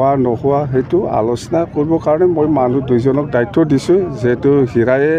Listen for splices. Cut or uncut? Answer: uncut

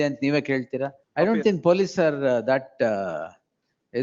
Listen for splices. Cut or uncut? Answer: cut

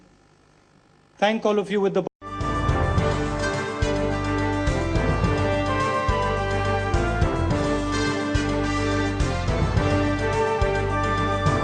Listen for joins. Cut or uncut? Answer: uncut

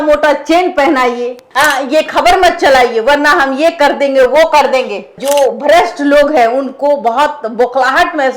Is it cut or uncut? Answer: cut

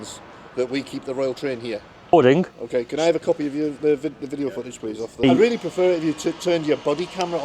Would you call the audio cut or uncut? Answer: cut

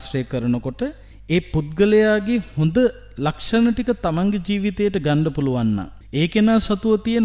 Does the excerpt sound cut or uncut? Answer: cut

